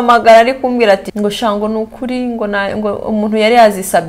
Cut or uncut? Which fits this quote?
cut